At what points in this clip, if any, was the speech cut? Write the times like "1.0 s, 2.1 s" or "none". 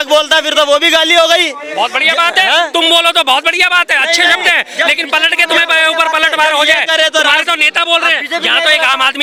none